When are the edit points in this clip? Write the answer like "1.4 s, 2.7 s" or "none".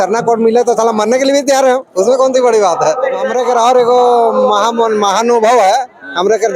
3.3 s